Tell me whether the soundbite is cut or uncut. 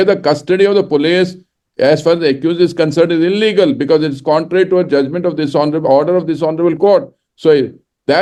uncut